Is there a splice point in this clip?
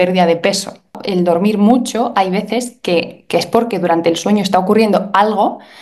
yes; 1 cut; at 1.0 s

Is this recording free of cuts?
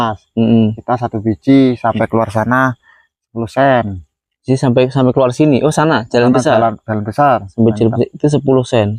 yes; 0 cuts

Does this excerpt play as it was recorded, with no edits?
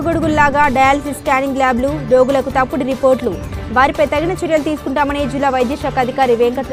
yes; 0 cuts

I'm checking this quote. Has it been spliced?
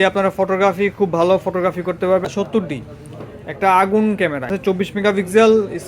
yes; 2 cuts; at 2.3 s, 4.5 s

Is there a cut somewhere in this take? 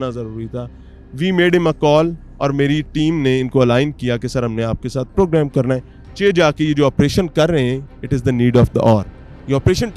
no; 0 cuts

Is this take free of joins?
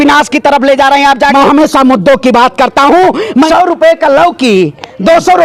no; 2 cuts; at 1.3 s, 3.5 s

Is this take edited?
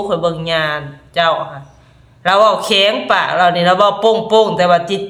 no; 0 cuts

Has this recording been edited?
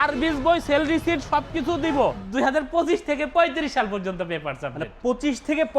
yes; 1 cut; at 2.2 s

